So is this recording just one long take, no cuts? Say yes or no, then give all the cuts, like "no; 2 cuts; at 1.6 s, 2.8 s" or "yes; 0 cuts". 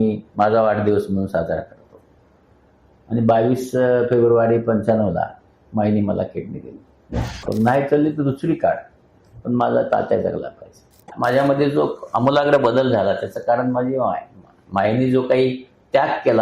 no; 2 cuts; at 7.5 s, 11.1 s